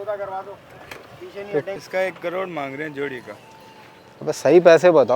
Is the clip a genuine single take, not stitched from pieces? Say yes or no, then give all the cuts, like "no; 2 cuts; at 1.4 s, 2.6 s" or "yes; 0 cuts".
no; 1 cut; at 1.8 s